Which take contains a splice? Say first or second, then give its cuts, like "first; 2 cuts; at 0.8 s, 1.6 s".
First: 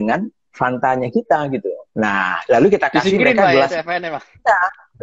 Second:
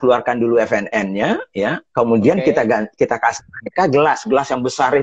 first; 1 cut; at 1.8 s